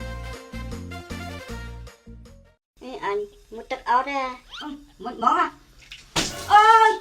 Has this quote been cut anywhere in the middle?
yes; 1 cut; at 2.6 s

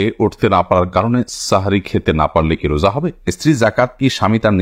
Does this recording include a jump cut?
yes; 1 cut; at 3.3 s

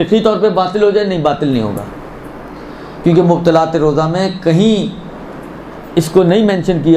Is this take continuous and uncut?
no; 1 cut; at 1.2 s

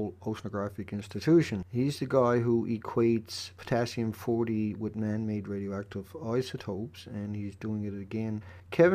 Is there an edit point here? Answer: no; 0 cuts

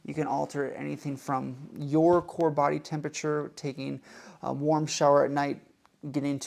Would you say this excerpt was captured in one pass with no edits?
yes; 0 cuts

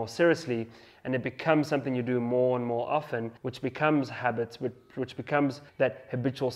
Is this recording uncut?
no; 2 cuts; at 3.4 s, 5.6 s

